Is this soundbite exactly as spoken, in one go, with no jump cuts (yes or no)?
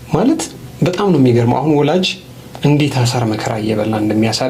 yes